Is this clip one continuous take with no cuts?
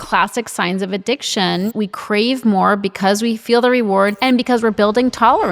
no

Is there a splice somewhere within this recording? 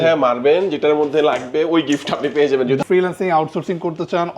yes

